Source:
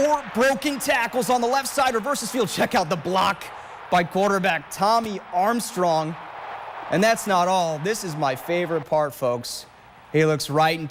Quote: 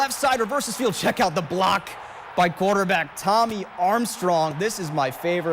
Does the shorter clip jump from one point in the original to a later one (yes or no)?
yes